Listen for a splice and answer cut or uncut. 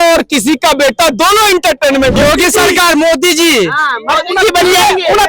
cut